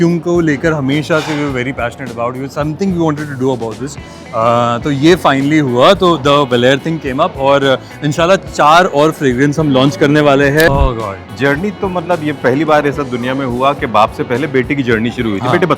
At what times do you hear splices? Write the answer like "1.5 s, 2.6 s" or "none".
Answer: 10.7 s